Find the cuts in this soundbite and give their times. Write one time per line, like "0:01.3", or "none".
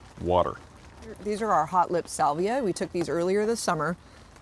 0:01.2